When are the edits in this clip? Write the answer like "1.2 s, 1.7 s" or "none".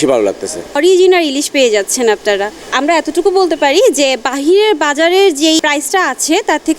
0.8 s, 5.6 s